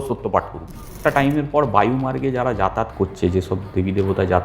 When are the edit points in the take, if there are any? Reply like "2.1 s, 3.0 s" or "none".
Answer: 0.9 s